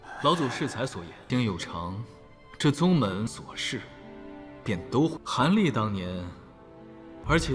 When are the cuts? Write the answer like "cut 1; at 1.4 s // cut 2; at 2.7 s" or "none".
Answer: none